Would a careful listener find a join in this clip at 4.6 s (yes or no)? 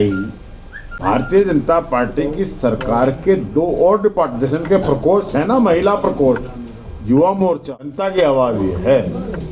no